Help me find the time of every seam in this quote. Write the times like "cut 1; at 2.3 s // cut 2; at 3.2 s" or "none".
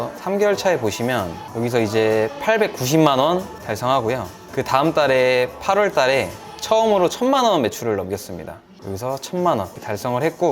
none